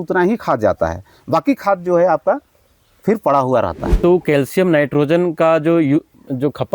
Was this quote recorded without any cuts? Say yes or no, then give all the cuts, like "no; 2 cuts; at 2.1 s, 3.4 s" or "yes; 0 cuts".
no; 1 cut; at 3.8 s